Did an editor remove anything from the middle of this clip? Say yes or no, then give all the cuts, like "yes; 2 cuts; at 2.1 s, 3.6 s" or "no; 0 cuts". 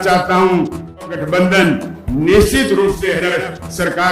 yes; 2 cuts; at 1.1 s, 3.1 s